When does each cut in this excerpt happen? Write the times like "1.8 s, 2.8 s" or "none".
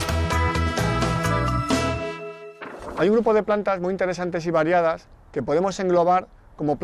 1.8 s